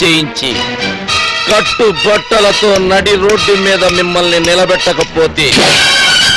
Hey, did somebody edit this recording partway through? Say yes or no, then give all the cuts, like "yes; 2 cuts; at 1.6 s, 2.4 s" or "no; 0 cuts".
no; 0 cuts